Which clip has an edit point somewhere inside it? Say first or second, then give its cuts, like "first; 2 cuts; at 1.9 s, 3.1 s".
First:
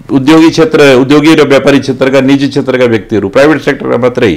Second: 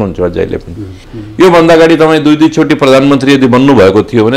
second; 1 cut; at 1.1 s